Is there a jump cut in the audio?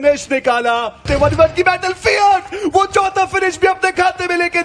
yes; 1 cut; at 1.1 s

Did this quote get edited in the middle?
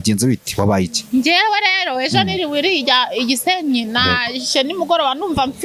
no; 0 cuts

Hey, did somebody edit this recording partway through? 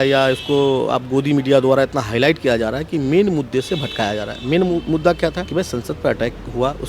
yes; 1 cut; at 5.4 s

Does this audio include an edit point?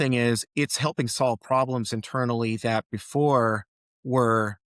no; 0 cuts

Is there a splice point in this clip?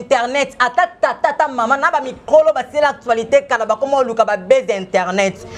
no; 0 cuts

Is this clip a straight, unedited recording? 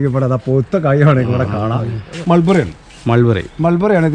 no; 1 cut; at 2.1 s

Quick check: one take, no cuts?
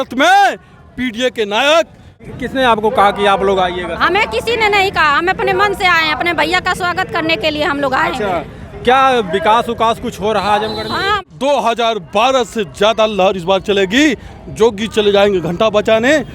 no; 2 cuts; at 2.2 s, 11.2 s

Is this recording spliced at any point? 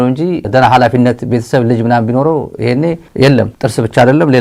no; 0 cuts

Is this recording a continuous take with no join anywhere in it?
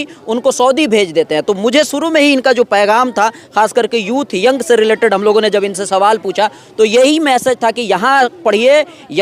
yes; 0 cuts

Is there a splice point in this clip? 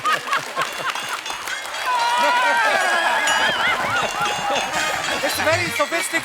no; 0 cuts

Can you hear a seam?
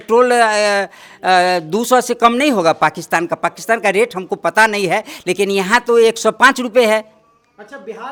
no; 0 cuts

